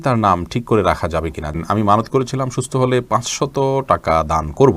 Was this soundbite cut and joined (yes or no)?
yes